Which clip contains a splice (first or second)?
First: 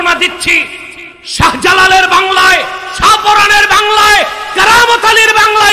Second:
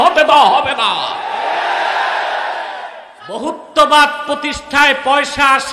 second